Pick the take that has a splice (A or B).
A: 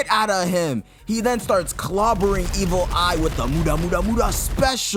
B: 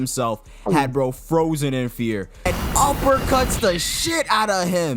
B